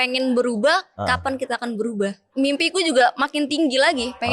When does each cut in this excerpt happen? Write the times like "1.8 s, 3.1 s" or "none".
2.3 s